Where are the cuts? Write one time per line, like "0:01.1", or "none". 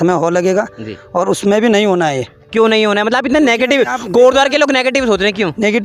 none